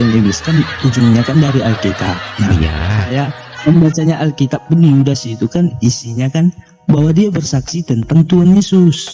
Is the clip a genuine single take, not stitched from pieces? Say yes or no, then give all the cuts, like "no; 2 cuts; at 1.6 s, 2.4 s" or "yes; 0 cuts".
yes; 0 cuts